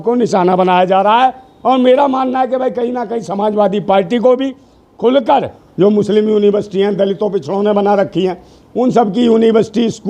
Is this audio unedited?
no; 1 cut; at 5.6 s

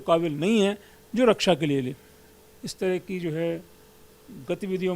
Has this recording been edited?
yes; 1 cut; at 2.6 s

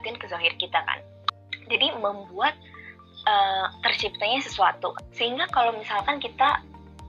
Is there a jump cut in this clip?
yes; 2 cuts; at 1.1 s, 5.0 s

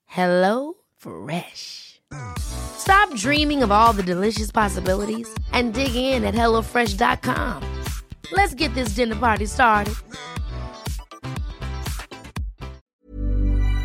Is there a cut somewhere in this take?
yes; 1 cut; at 12.9 s

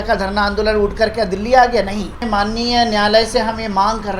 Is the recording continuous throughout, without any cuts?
no; 1 cut; at 2.2 s

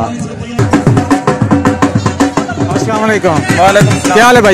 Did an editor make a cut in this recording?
yes; 1 cut; at 2.8 s

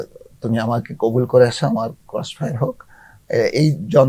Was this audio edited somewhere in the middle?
no; 0 cuts

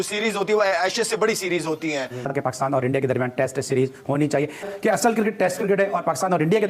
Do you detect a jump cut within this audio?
yes; 1 cut; at 2.2 s

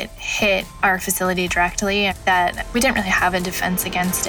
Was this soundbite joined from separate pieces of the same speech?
no; 0 cuts

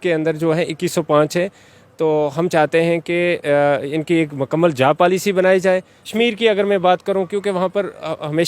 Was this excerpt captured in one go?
no; 1 cut; at 6.0 s

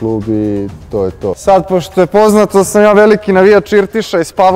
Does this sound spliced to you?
yes; 1 cut; at 1.4 s

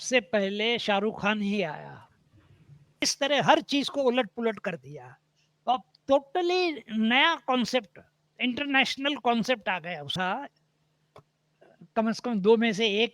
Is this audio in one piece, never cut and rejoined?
no; 2 cuts; at 3.1 s, 10.1 s

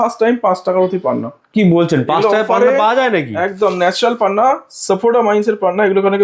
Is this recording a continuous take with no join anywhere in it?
yes; 0 cuts

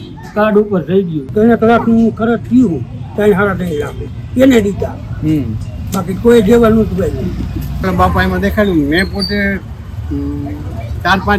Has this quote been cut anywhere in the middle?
yes; 2 cuts; at 1.3 s, 7.9 s

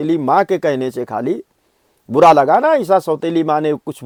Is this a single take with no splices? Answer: yes; 0 cuts

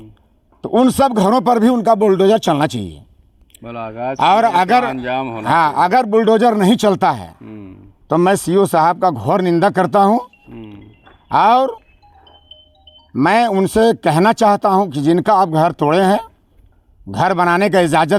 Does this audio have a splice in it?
no; 0 cuts

